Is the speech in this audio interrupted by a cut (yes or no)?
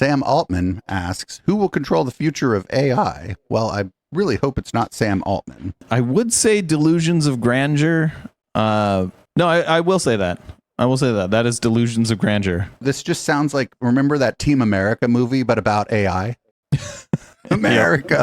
yes